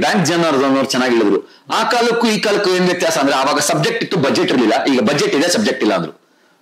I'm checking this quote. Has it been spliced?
no; 0 cuts

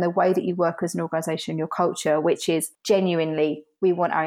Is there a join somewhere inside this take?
no; 0 cuts

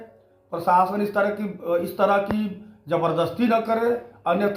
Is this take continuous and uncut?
yes; 0 cuts

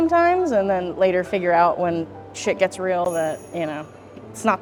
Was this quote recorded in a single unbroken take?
yes; 0 cuts

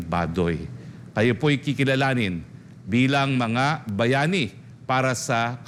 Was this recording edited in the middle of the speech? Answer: no; 0 cuts

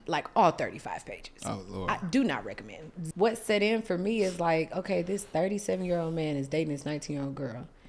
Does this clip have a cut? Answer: yes; 1 cut; at 3.0 s

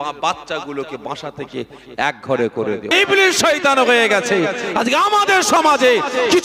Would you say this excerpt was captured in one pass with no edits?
no; 1 cut; at 2.9 s

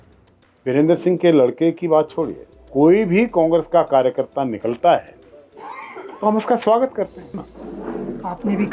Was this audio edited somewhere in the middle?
yes; 1 cut; at 7.4 s

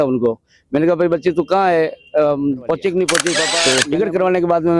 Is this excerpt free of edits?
no; 1 cut; at 3.5 s

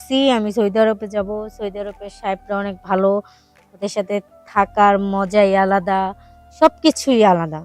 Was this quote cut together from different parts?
no; 0 cuts

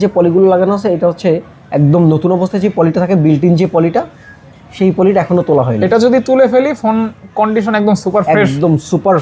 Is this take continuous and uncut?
yes; 0 cuts

